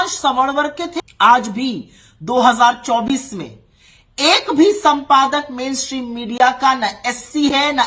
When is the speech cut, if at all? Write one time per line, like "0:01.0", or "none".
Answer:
0:00.9